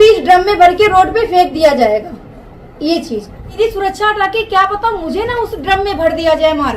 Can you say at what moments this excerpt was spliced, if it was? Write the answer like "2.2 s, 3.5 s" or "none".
3.5 s